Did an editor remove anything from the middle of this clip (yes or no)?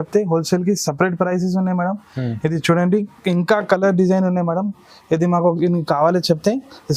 no